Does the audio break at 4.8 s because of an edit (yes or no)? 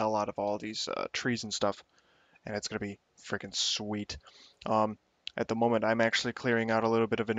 no